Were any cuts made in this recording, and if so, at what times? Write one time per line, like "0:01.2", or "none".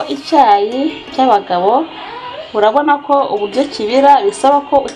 none